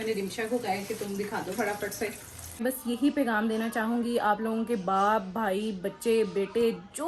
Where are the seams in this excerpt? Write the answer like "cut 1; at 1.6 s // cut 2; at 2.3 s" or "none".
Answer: cut 1; at 2.6 s